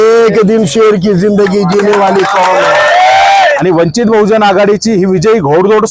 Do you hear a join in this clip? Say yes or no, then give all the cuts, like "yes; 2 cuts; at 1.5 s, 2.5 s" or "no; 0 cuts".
yes; 1 cut; at 3.6 s